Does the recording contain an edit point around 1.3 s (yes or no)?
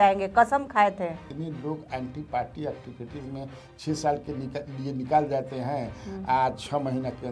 yes